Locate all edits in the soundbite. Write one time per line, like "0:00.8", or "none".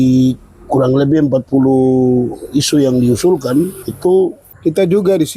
0:03.8
0:04.5

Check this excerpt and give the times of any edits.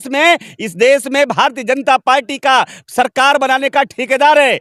none

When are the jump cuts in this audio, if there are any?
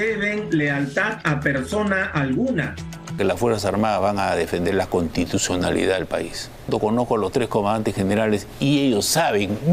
0:03.2
0:06.7

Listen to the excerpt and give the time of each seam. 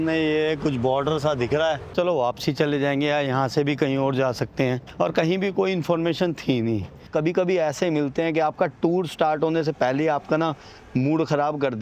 0:01.9
0:04.8
0:07.0

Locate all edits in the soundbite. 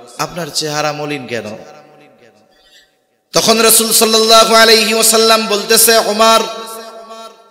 none

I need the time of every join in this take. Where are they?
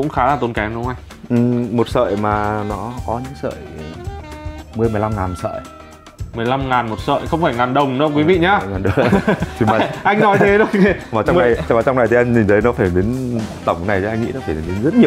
none

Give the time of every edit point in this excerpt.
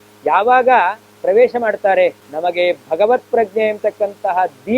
0:02.3

